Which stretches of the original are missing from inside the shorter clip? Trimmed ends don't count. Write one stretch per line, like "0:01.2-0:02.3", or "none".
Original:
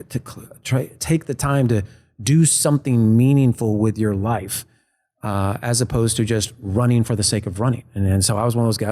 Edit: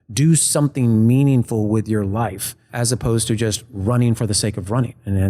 0:04.8-0:05.6